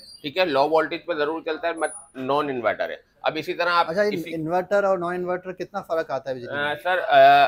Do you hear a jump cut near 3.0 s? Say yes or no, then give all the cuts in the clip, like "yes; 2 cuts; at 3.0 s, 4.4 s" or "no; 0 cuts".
no; 0 cuts